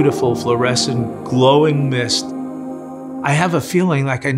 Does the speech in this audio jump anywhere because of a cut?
yes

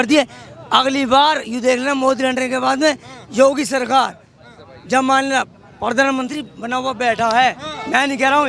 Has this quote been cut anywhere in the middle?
no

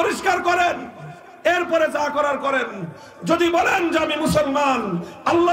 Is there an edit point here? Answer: no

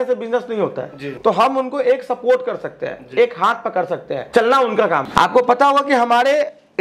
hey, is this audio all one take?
no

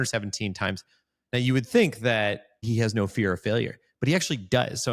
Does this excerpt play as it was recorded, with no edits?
no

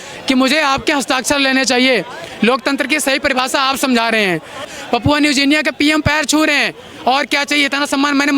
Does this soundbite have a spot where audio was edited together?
yes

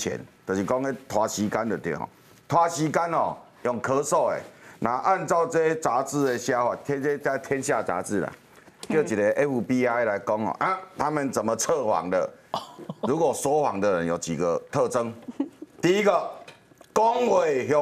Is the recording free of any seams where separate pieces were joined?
yes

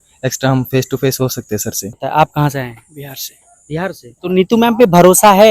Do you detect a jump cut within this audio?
yes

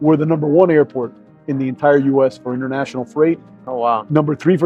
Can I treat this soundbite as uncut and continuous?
yes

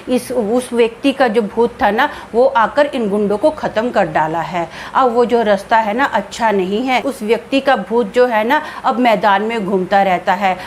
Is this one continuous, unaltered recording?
no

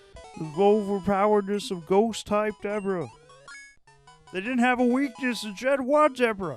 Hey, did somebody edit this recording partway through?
no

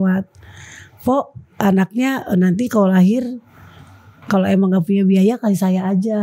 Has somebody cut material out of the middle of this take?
no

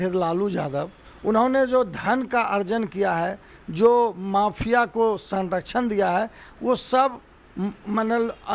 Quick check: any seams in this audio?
no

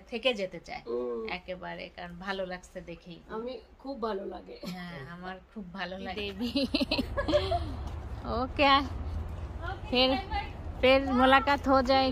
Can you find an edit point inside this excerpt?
yes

